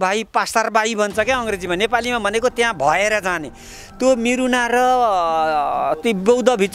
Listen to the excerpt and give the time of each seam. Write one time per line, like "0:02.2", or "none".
none